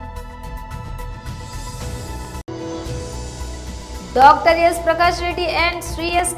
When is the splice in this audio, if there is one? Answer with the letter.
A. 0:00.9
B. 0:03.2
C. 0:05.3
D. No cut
A